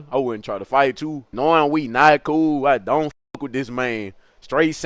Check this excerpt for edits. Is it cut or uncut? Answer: cut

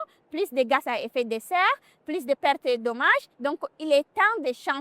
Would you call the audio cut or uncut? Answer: cut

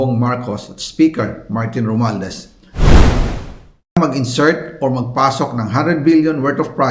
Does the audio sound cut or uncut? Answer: cut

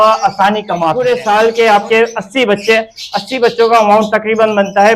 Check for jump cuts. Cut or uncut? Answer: cut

